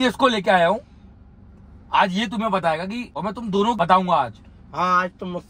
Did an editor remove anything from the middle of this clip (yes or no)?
no